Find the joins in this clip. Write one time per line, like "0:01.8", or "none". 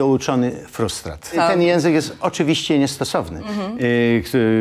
0:01.3